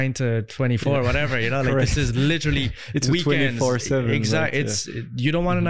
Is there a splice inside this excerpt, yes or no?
no